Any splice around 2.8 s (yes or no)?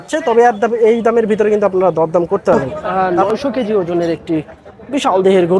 yes